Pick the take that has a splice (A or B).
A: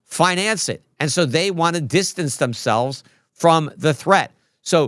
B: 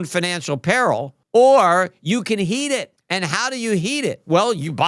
B